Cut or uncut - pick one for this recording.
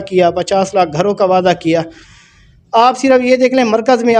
uncut